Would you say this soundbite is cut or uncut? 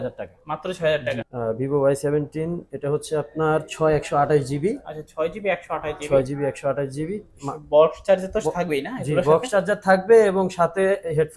cut